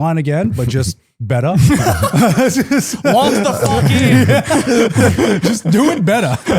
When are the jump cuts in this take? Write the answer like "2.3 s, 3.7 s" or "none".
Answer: none